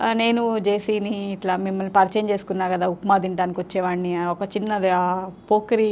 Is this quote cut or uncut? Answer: uncut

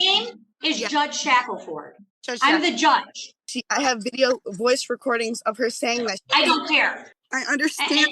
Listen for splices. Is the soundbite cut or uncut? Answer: cut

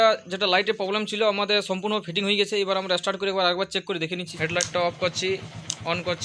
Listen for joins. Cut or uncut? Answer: cut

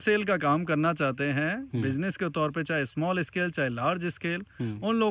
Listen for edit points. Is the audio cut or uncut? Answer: uncut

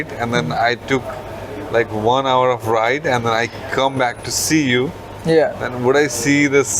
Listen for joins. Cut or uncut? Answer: uncut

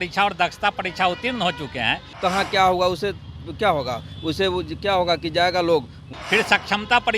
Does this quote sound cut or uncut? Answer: cut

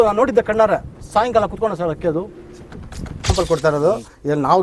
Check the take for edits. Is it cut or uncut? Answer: cut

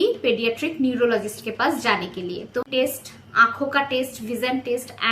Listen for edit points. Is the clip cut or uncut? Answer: cut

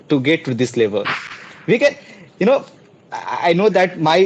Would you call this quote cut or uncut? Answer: uncut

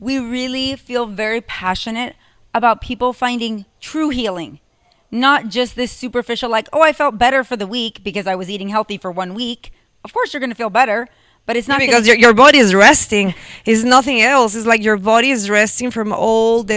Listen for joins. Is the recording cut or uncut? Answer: uncut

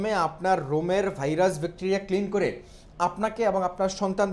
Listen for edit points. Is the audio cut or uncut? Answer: uncut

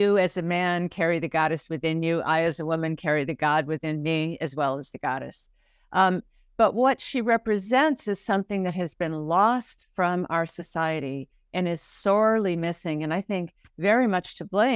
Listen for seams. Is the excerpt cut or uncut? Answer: uncut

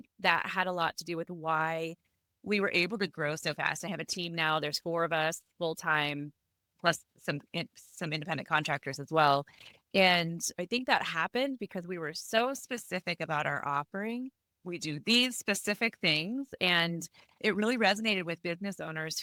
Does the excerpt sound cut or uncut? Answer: uncut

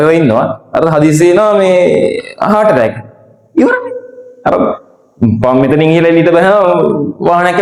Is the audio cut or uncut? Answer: uncut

